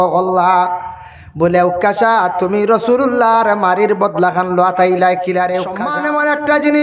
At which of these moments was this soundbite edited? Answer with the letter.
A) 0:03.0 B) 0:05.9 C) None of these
B